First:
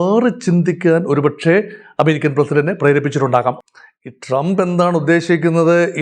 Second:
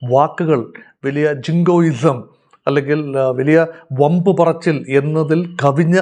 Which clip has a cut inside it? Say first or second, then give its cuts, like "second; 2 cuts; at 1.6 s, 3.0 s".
first; 1 cut; at 3.6 s